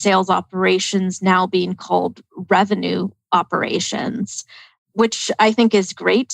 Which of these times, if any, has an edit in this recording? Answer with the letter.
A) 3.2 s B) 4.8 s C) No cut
B